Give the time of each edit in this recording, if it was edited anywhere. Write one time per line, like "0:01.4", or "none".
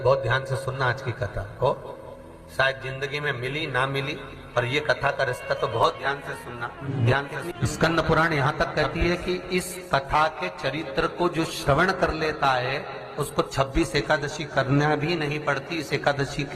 0:06.8
0:07.5